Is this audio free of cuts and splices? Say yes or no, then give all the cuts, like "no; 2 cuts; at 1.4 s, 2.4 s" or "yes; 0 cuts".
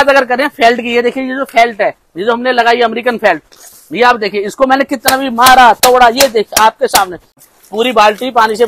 no; 1 cut; at 7.4 s